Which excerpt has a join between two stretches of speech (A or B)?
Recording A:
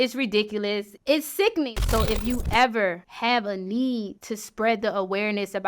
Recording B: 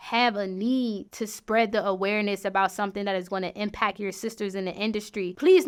A